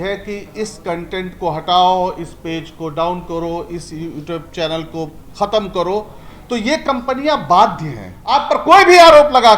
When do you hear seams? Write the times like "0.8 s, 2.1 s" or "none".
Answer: 8.4 s